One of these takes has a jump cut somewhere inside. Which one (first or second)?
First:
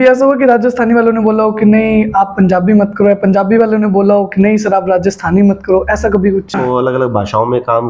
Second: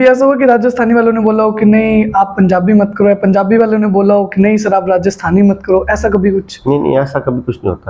first